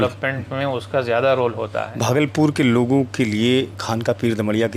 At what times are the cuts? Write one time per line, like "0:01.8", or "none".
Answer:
0:01.9